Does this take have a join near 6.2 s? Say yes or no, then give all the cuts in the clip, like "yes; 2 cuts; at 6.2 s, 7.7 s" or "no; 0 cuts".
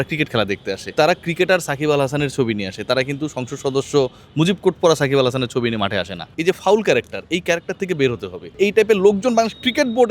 yes; 3 cuts; at 0.9 s, 6.2 s, 8.5 s